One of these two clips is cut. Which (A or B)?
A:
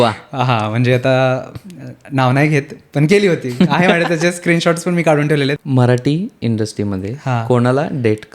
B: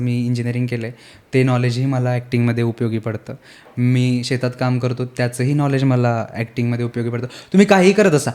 A